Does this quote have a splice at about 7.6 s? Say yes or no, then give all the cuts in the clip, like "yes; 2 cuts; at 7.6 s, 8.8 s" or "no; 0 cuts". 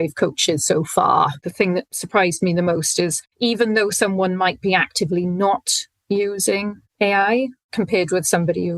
no; 1 cut; at 1.4 s